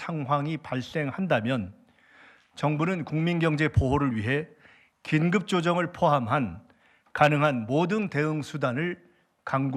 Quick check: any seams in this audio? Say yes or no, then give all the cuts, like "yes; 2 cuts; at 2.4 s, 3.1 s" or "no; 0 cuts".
no; 0 cuts